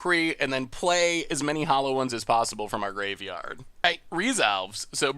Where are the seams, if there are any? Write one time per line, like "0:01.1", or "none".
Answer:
0:03.8